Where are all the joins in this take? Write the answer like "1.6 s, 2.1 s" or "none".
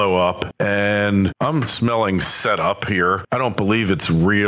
2.7 s